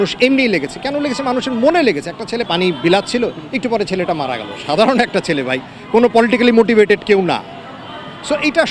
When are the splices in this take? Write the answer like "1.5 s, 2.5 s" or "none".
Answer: 2.5 s